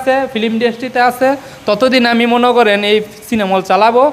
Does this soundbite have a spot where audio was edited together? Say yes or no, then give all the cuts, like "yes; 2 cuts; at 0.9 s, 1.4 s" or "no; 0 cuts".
no; 0 cuts